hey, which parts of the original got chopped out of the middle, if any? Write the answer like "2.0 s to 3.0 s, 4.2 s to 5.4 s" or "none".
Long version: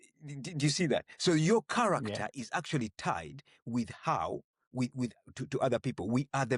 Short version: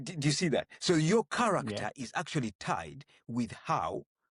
none